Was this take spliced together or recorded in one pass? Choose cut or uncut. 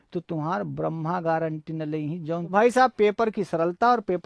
cut